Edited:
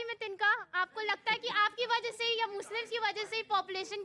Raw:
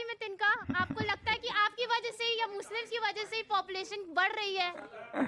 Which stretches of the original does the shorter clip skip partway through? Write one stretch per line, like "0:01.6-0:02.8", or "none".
none